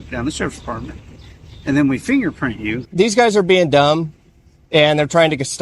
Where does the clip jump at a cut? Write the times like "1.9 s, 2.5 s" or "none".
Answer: 2.8 s